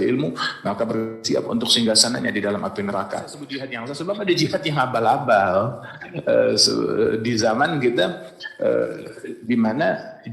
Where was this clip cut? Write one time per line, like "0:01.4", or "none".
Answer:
0:03.8